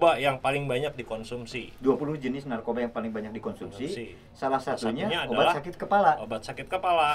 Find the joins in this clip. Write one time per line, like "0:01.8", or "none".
none